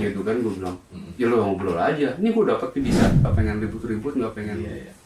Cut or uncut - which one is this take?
cut